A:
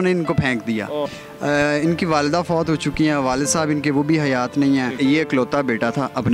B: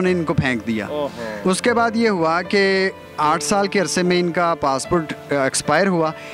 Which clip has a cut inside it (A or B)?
A